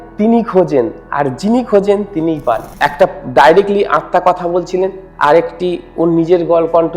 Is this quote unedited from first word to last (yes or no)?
no